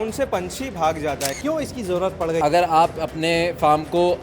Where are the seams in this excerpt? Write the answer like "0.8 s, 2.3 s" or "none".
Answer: 1.3 s, 2.4 s

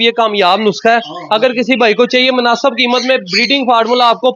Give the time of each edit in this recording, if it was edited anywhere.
none

